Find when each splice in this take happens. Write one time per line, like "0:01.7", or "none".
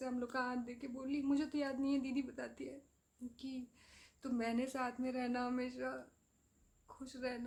none

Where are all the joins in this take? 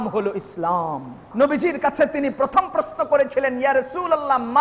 0:01.2

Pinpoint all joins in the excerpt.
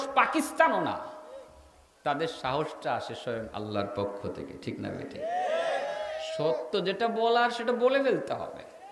none

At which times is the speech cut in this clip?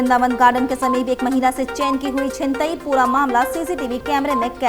none

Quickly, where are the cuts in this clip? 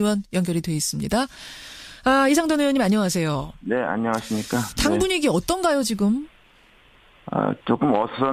none

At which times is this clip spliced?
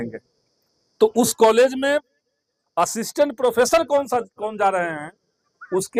none

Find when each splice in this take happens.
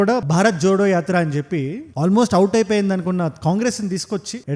none

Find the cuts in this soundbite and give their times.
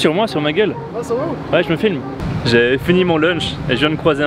0:02.1

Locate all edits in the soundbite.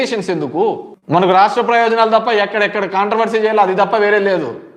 0:00.9

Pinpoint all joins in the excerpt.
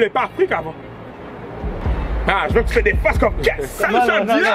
0:01.8

